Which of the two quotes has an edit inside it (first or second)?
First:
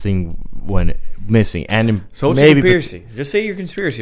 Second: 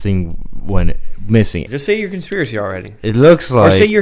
second